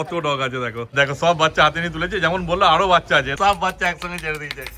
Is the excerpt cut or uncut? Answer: cut